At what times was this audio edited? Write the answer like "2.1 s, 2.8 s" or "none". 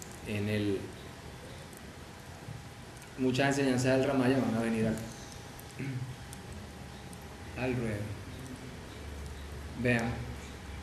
3.5 s